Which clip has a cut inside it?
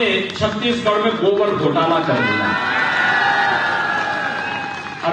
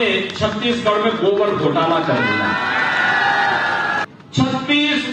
second; 1 cut; at 4.0 s

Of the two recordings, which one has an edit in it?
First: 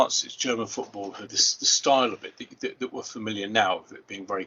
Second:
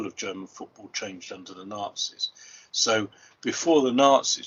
first; 1 cut; at 1.3 s

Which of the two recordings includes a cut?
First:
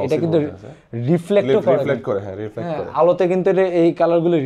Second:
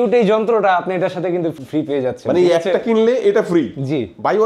second; 1 cut; at 1.5 s

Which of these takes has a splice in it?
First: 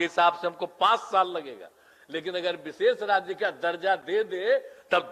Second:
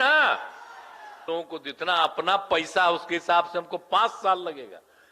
second; 1 cut; at 1.2 s

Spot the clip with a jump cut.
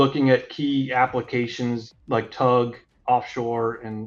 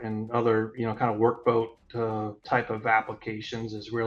first; 2 cuts; at 1.9 s, 2.9 s

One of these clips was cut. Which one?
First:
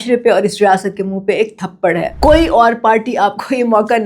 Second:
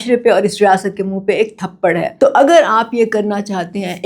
first; 1 cut; at 2.1 s

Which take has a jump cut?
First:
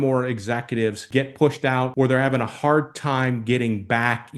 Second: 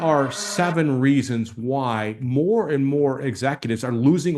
first; 2 cuts; at 1.0 s, 1.9 s

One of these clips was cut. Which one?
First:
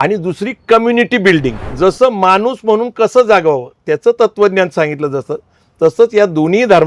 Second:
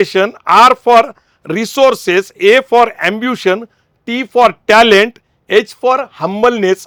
first; 1 cut; at 1.6 s

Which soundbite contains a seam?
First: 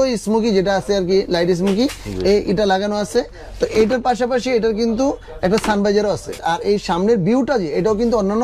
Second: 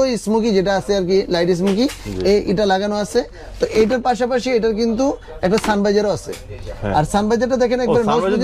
first; 1 cut; at 6.3 s

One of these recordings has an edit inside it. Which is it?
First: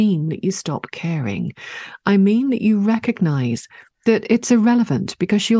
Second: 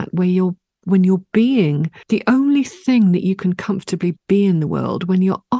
second; 1 cut; at 1.9 s

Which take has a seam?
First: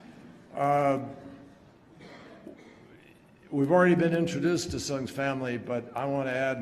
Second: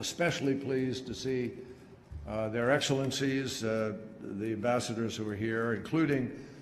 second; 1 cut; at 4.9 s

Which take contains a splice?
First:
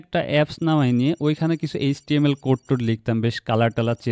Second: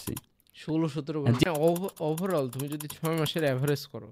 second; 1 cut; at 1.4 s

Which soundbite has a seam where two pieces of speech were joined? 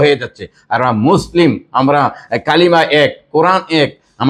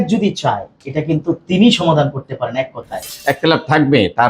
second; 1 cut; at 2.9 s

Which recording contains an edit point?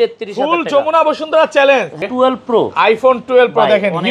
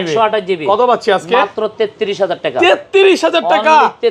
first; 1 cut; at 2.0 s

